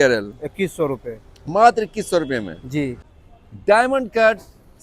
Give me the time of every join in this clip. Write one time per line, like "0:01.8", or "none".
0:03.0